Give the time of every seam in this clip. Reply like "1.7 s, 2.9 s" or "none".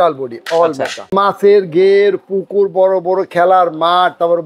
1.1 s

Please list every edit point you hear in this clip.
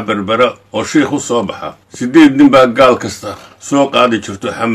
1.9 s

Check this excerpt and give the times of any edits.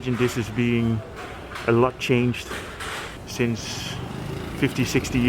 3.2 s

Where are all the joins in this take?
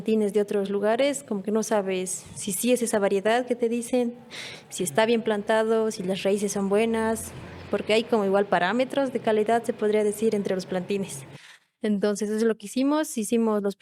none

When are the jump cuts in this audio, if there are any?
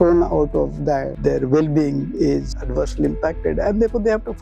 1.2 s, 2.5 s

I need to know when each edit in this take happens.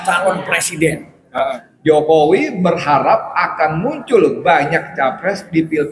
1.7 s

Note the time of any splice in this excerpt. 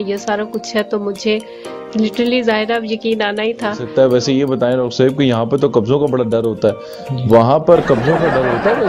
3.8 s

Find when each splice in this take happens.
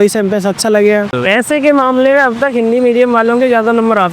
1.2 s

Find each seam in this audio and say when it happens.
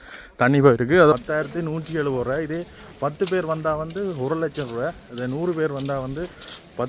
1.1 s

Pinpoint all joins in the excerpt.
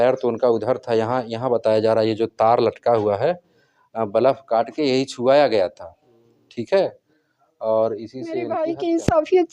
8.5 s

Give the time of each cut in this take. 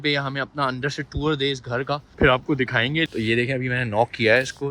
2.1 s, 3.1 s

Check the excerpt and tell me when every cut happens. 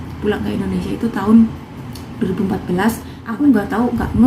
3.2 s

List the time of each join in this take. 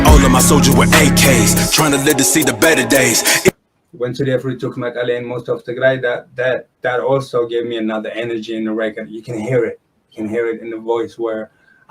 3.5 s

